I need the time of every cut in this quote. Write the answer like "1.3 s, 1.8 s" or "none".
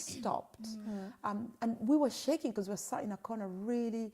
none